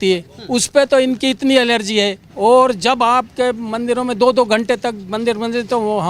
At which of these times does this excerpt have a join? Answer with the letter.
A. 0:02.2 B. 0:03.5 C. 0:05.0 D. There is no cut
A